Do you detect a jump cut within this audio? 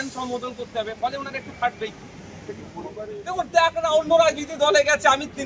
yes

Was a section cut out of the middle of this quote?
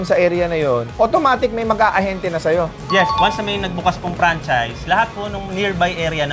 yes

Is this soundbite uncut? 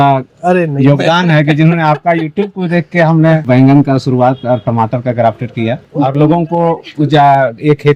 no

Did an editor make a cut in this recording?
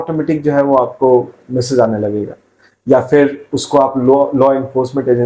no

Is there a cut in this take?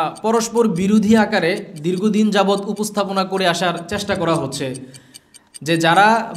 no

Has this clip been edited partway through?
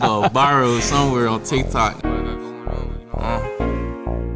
yes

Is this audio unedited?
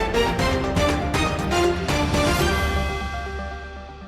no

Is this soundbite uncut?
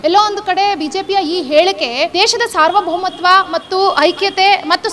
no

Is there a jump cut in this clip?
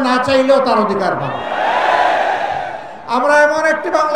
no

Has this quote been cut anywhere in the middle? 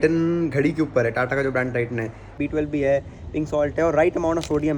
yes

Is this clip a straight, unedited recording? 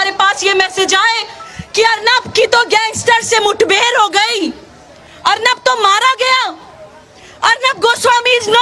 yes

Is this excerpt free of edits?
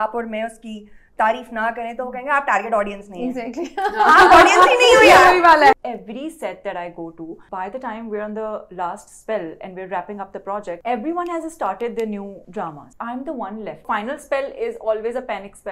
no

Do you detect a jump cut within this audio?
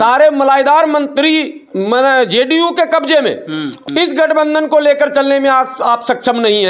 yes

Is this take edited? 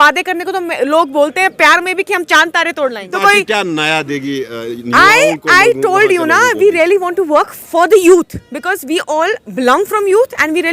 yes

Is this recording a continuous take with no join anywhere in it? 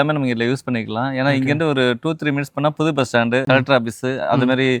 yes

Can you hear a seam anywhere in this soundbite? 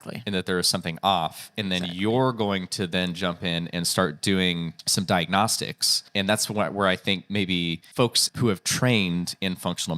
yes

